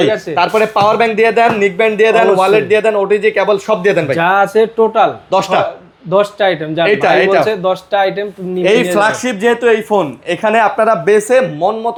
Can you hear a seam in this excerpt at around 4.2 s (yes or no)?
no